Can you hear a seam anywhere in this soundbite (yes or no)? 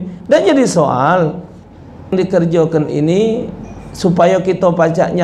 yes